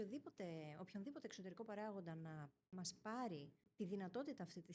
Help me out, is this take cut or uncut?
cut